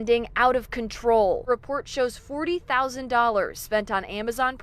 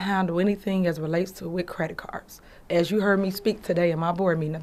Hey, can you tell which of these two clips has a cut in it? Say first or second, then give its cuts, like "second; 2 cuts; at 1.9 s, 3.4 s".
first; 1 cut; at 1.5 s